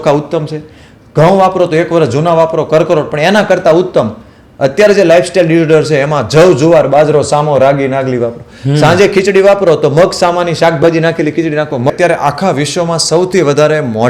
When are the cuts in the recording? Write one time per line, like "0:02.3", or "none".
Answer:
0:11.9